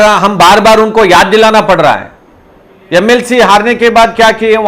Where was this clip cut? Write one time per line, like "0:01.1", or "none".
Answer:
0:02.1